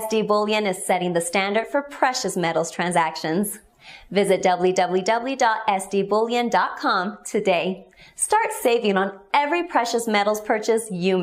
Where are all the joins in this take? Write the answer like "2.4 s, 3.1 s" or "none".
none